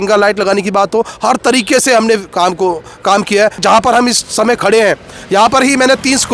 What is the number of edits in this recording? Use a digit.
1